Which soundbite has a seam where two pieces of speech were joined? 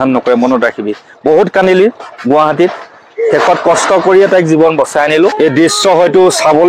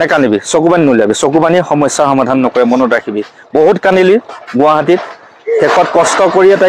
first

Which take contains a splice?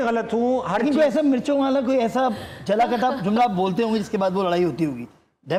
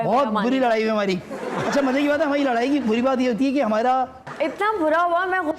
second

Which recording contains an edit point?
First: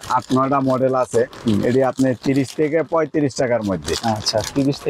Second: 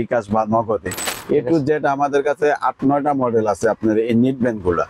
second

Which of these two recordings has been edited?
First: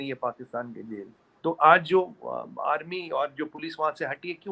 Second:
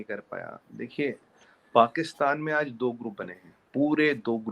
first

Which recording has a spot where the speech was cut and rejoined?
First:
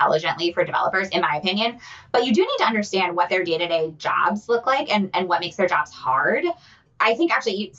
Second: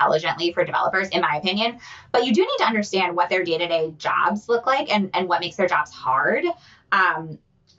first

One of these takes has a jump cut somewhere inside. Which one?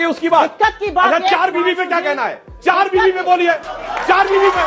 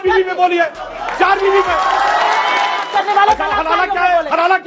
second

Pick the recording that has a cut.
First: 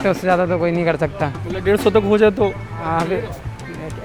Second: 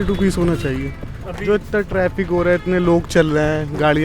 second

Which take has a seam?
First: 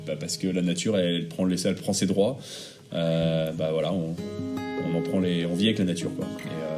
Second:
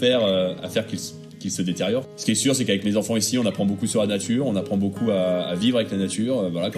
second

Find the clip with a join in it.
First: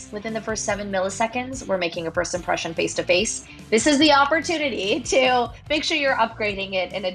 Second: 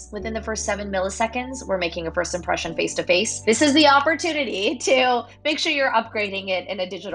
second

